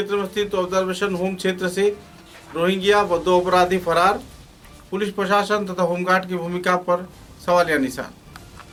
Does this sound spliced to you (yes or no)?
no